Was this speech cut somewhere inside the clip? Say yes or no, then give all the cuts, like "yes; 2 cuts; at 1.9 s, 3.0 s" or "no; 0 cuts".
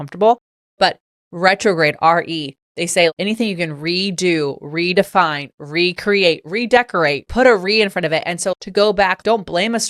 no; 0 cuts